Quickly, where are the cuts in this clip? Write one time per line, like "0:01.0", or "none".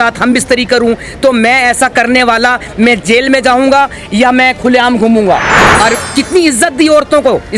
0:05.6